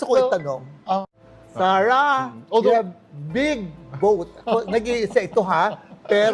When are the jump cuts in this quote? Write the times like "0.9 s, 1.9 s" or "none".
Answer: 1.1 s